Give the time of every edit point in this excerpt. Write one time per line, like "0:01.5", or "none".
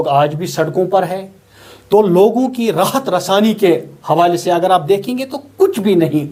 none